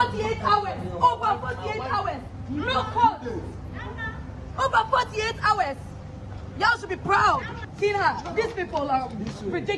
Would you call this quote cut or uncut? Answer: uncut